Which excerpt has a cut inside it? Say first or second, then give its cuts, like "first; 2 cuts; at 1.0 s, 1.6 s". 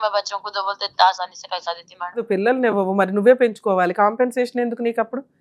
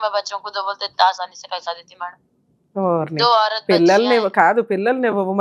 first; 1 cut; at 2.2 s